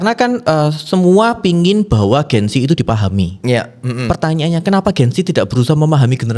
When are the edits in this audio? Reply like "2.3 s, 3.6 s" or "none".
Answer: none